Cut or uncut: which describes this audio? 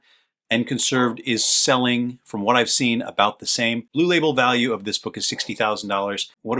uncut